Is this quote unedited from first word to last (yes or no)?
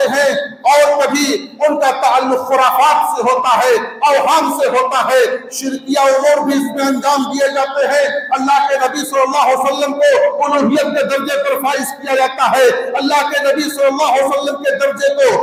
yes